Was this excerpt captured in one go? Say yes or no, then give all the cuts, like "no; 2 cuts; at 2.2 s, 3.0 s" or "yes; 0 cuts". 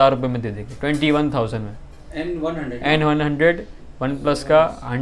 yes; 0 cuts